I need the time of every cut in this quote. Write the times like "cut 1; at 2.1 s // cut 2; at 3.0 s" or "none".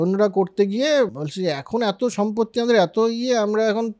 cut 1; at 1.2 s